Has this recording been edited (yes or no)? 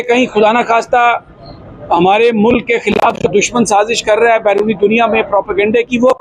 no